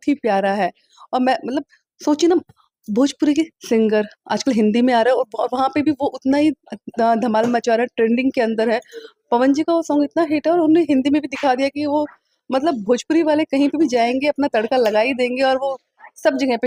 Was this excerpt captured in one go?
yes; 0 cuts

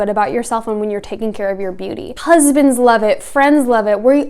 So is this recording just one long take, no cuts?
no; 1 cut; at 2.1 s

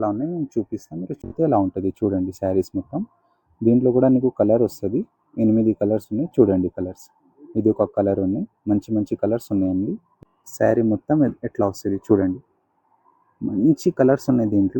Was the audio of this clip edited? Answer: yes; 2 cuts; at 1.3 s, 10.1 s

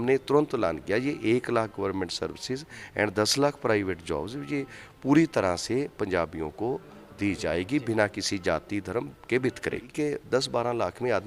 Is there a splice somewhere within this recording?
yes; 1 cut; at 9.9 s

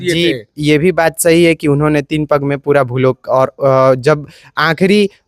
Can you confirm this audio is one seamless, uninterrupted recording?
yes; 0 cuts

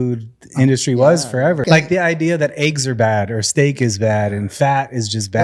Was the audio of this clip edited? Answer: yes; 1 cut; at 1.6 s

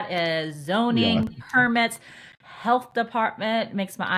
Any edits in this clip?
no; 0 cuts

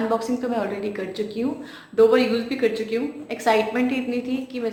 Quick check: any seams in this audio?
no; 0 cuts

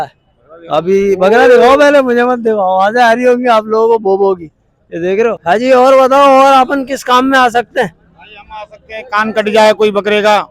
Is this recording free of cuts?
no; 1 cut; at 5.4 s

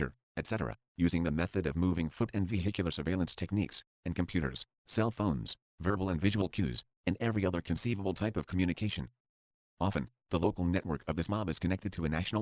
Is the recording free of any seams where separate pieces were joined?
yes; 0 cuts

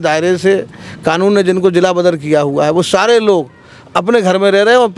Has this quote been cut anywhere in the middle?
no; 0 cuts

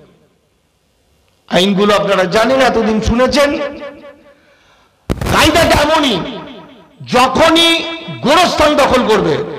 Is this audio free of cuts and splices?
yes; 0 cuts

